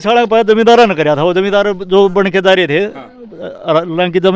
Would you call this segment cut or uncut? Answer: uncut